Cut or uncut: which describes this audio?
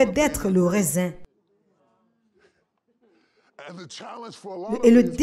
uncut